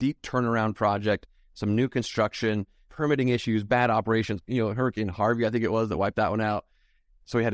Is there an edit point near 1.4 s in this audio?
no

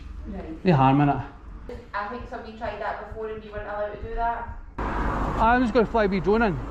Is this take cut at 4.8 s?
yes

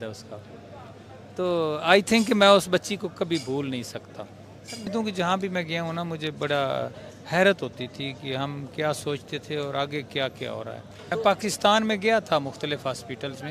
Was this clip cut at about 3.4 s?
no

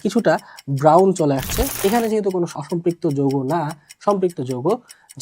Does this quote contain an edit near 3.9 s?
no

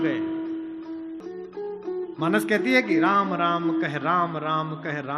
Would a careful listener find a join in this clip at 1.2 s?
yes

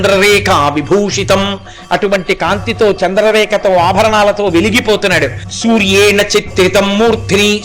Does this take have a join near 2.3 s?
no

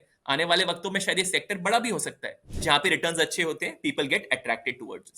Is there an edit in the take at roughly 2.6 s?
yes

